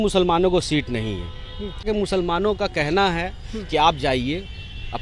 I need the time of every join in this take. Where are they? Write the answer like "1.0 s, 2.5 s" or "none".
1.8 s